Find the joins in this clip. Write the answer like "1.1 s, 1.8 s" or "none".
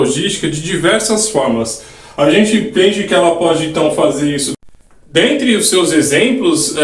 4.6 s